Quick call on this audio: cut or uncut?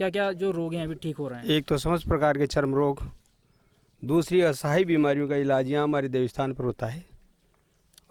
uncut